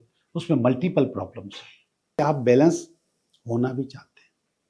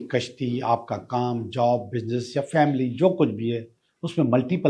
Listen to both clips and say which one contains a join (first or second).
first